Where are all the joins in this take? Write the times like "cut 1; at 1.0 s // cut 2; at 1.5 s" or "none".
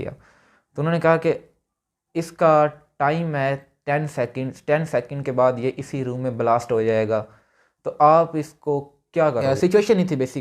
cut 1; at 9.4 s